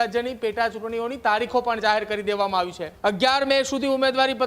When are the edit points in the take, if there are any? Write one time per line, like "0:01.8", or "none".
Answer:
0:02.8